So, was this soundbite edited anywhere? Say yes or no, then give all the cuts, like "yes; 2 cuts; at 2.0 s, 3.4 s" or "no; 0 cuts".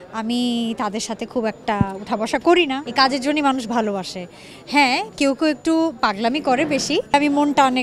yes; 2 cuts; at 2.8 s, 7.1 s